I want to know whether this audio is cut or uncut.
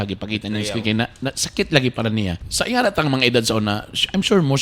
cut